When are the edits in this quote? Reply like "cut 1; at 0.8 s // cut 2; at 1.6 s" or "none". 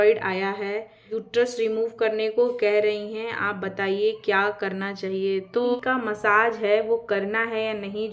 cut 1; at 1.1 s // cut 2; at 5.8 s